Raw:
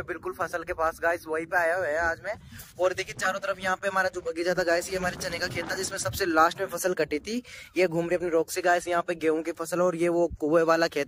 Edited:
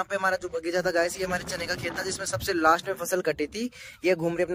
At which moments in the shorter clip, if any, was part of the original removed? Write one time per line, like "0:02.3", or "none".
none